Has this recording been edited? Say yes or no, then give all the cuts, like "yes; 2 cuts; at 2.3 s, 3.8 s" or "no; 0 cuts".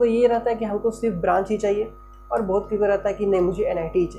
no; 0 cuts